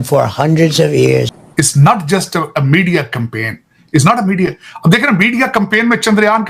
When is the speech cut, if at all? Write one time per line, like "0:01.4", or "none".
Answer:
0:01.3